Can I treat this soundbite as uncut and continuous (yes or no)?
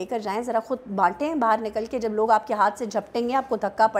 yes